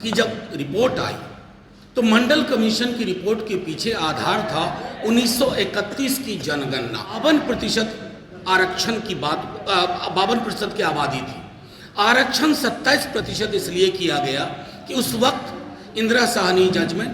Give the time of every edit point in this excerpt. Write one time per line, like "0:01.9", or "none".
0:07.2